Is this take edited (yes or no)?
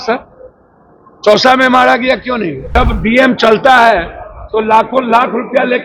yes